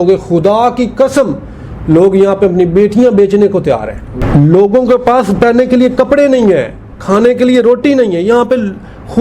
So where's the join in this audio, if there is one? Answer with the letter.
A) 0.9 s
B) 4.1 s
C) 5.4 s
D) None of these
B